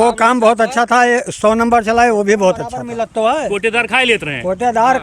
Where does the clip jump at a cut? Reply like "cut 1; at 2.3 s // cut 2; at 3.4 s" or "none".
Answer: cut 1; at 2.9 s